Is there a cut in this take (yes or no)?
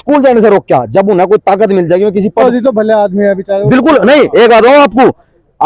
yes